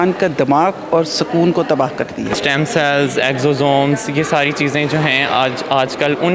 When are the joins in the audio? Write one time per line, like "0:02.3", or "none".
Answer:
0:02.4